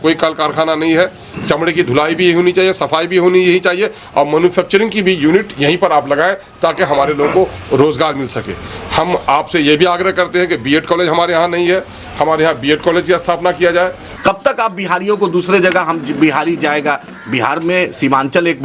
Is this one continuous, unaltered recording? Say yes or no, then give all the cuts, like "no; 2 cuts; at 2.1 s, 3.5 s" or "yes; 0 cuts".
no; 1 cut; at 14.1 s